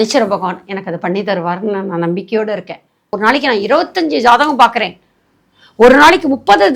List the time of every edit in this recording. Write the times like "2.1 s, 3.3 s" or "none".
3.1 s